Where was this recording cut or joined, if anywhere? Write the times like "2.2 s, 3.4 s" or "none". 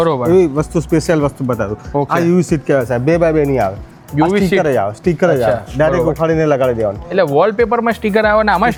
none